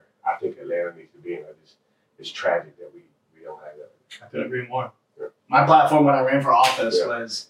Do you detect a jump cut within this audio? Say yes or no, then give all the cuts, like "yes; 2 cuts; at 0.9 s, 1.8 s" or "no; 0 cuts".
no; 0 cuts